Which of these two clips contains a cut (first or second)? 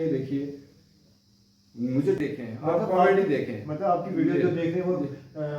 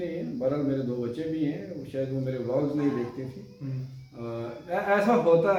first